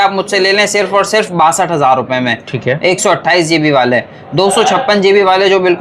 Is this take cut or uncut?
uncut